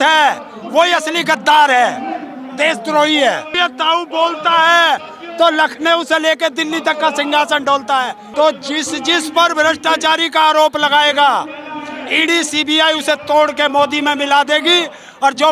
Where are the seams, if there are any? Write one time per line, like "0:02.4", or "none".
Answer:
0:03.5
0:08.2